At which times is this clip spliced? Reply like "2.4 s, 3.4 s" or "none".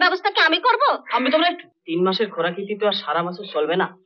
1.7 s